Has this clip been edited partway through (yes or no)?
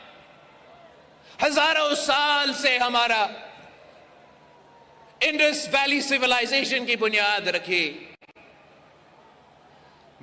no